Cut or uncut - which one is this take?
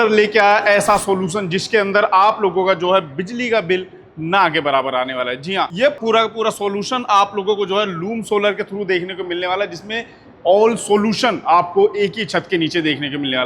uncut